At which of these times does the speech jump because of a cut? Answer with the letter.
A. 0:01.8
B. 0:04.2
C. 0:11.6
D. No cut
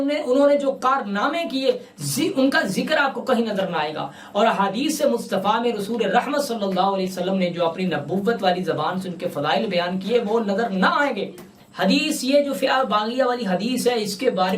C